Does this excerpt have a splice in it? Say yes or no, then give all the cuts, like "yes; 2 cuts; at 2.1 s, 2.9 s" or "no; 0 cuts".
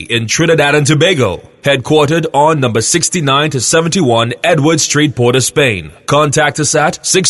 yes; 1 cut; at 5.9 s